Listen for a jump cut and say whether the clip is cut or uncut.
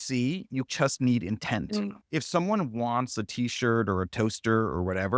cut